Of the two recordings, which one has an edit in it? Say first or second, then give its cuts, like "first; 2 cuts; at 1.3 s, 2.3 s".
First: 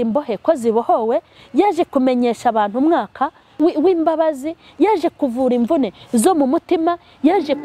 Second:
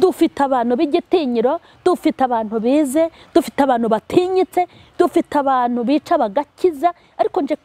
first; 1 cut; at 3.5 s